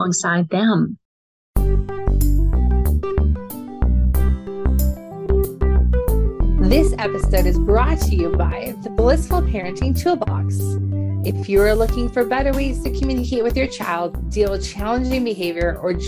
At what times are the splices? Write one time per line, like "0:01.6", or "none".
0:01.4